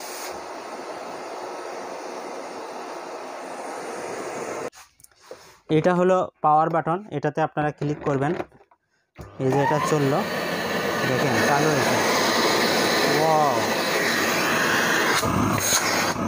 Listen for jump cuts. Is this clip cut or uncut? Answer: cut